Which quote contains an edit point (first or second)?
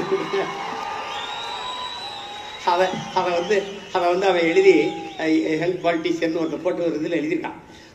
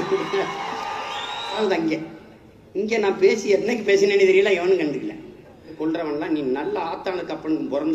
second